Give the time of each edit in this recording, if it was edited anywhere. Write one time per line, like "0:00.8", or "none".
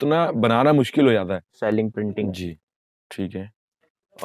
0:01.6